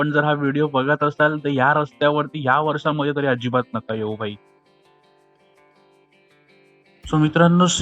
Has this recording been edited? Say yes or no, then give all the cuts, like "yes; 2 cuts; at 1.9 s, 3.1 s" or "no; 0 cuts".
no; 0 cuts